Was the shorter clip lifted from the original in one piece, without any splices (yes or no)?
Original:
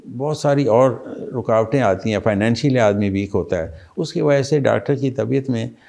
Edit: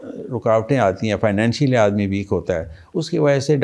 yes